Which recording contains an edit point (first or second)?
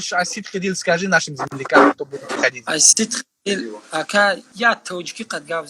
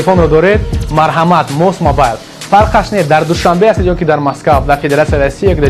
first